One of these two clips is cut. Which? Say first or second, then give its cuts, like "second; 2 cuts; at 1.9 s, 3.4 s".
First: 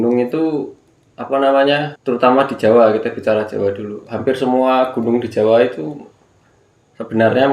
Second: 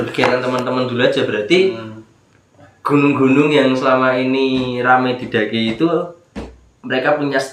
first; 1 cut; at 1.9 s